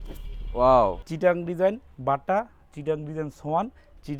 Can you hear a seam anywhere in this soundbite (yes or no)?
yes